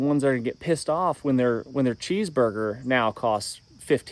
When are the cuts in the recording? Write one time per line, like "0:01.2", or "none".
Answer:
none